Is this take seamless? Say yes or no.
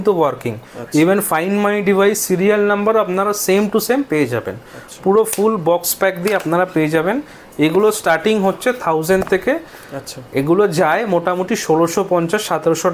yes